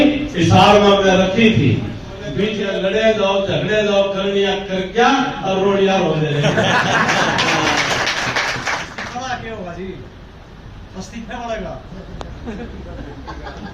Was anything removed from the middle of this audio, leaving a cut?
yes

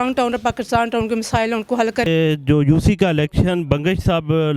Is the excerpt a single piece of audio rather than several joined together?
no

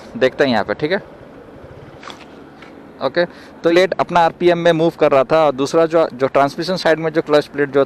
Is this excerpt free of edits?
no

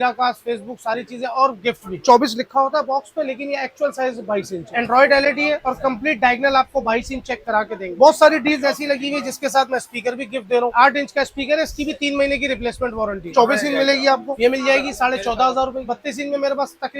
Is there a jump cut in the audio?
yes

